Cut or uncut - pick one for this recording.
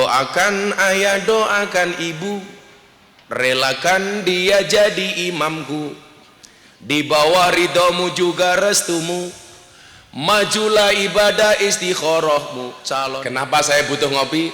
cut